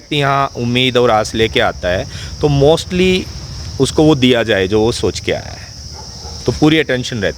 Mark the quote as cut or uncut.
uncut